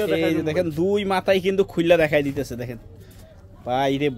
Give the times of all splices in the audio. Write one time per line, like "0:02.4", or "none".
none